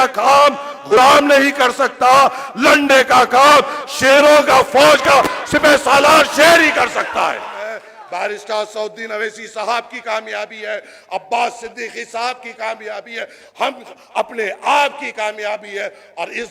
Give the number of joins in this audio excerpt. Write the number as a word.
two